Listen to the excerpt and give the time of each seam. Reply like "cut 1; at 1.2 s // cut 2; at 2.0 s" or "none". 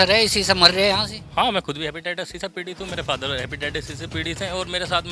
cut 1; at 1.2 s

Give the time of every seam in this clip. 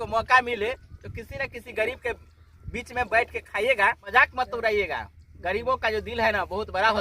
cut 1; at 4.1 s

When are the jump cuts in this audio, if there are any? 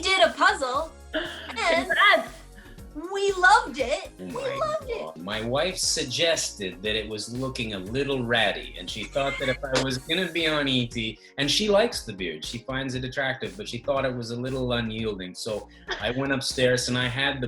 cut 1; at 4.1 s // cut 2; at 5.2 s

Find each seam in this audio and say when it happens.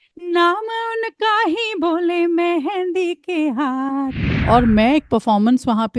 cut 1; at 4.3 s

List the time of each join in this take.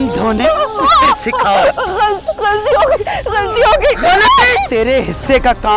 cut 1; at 4.6 s

